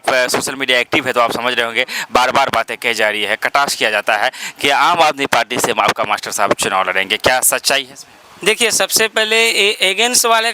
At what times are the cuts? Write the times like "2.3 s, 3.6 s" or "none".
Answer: none